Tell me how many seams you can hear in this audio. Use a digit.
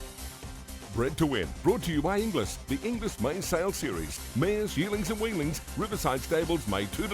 1